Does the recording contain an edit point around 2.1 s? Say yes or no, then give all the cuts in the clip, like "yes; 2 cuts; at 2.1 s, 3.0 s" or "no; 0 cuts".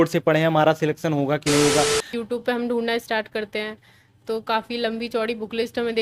yes; 1 cut; at 2.1 s